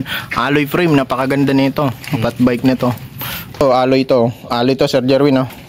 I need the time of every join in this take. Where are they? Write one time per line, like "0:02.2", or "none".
0:03.6